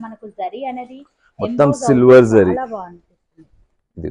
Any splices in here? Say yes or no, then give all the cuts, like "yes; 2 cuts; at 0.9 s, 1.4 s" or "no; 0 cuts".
no; 0 cuts